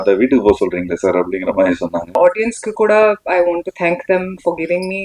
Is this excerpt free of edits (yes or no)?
no